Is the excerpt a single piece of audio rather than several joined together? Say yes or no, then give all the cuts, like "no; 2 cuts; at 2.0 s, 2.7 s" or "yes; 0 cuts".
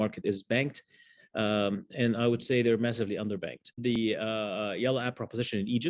no; 1 cut; at 4.0 s